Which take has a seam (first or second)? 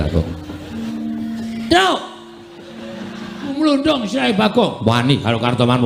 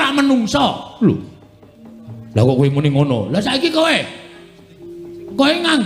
first